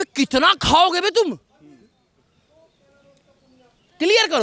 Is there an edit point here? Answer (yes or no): no